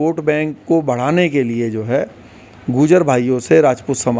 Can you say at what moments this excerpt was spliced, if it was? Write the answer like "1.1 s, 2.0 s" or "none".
none